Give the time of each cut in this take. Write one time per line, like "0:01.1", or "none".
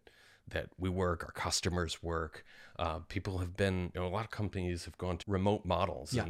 0:05.2

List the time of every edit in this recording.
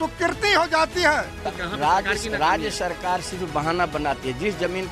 0:01.4

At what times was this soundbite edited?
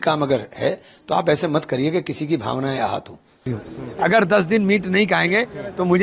0:03.5

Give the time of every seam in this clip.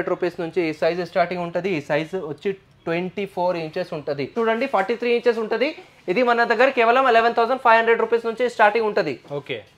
0:04.3

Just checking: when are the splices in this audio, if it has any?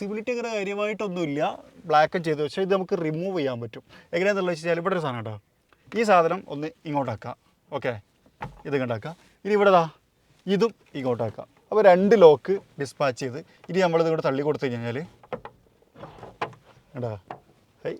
none

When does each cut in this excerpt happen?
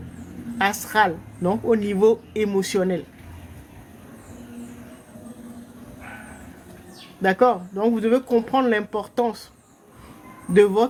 none

